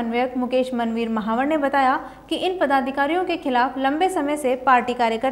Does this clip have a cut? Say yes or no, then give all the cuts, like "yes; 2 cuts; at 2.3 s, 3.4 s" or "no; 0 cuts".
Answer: no; 0 cuts